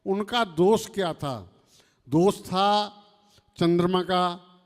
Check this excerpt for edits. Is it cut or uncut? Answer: uncut